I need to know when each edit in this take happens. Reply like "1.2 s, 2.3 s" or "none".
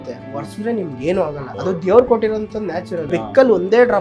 1.5 s, 3.0 s